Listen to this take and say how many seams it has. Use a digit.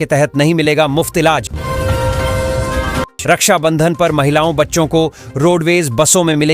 0